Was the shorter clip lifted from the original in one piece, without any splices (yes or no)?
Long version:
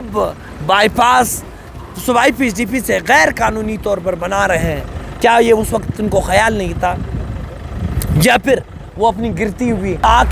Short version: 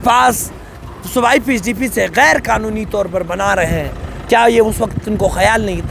yes